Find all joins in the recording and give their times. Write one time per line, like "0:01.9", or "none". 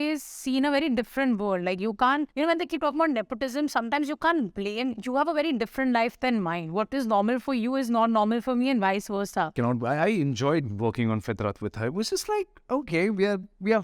0:09.5